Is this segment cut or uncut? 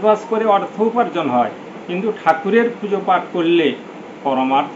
uncut